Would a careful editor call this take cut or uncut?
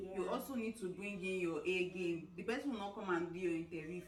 uncut